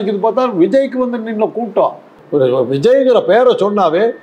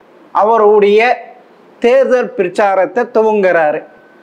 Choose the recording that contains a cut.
first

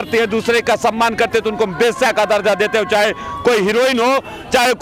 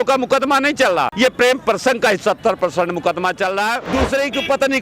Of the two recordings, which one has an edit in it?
second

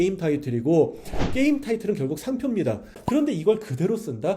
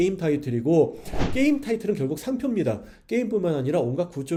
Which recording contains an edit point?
first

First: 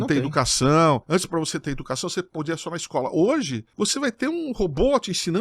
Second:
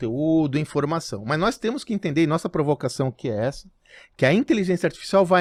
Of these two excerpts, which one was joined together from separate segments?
first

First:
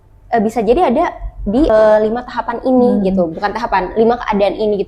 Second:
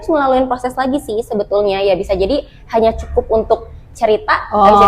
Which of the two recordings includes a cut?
first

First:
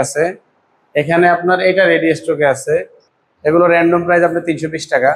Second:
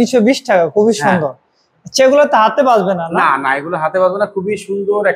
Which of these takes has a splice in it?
first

